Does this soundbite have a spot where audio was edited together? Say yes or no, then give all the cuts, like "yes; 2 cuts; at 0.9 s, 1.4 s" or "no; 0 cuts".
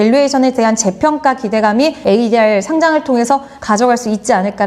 no; 0 cuts